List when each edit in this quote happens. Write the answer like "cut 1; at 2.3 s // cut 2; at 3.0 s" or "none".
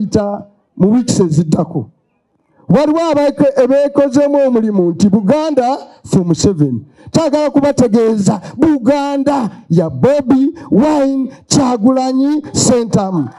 none